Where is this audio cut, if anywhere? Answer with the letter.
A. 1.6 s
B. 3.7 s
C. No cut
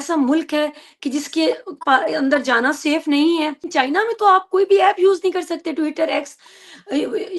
B